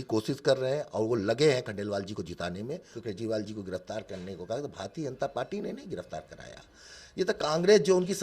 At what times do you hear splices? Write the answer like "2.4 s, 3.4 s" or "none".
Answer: 2.9 s